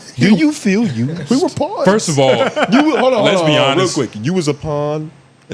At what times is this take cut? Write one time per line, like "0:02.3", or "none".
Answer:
none